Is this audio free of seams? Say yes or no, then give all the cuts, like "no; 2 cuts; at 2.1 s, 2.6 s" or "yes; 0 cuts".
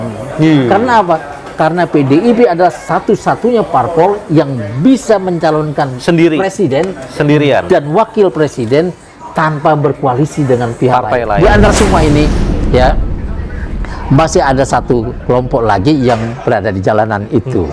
no; 1 cut; at 11.4 s